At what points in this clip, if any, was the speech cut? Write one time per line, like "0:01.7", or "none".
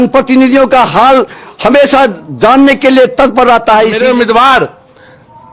0:04.0